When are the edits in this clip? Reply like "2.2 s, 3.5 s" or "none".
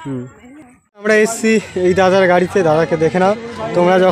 1.1 s